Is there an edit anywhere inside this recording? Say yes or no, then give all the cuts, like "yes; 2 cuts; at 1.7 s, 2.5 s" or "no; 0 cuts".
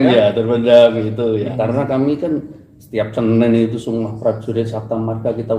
yes; 1 cut; at 1.5 s